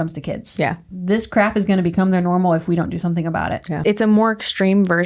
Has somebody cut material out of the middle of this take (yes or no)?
yes